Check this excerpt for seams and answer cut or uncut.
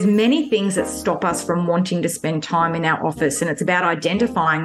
uncut